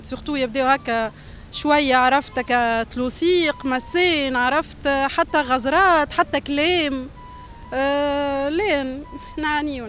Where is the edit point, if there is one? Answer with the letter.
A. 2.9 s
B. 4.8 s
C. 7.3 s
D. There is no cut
D